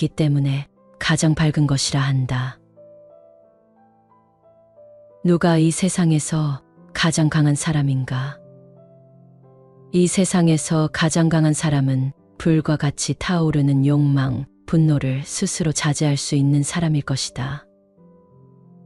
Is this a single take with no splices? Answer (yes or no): yes